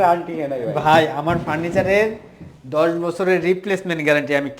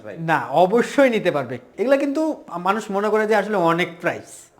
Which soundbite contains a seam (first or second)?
second